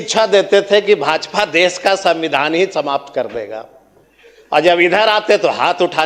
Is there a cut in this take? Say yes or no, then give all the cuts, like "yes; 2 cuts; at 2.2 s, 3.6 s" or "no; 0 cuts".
no; 0 cuts